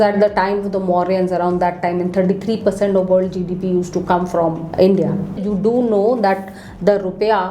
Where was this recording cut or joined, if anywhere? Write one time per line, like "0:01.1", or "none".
0:04.6
0:05.4